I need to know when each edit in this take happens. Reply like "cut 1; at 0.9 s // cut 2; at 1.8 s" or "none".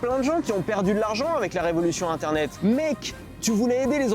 cut 1; at 2.5 s